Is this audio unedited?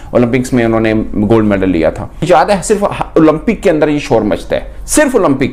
yes; 0 cuts

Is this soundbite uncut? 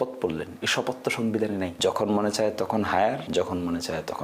no; 2 cuts; at 1.7 s, 3.2 s

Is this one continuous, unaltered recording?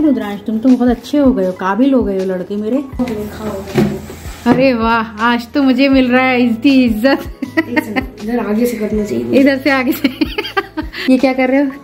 no; 2 cuts; at 2.9 s, 10.8 s

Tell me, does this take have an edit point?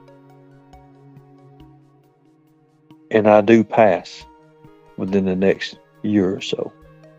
no; 0 cuts

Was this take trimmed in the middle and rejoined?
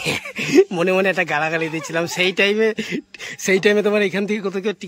no; 0 cuts

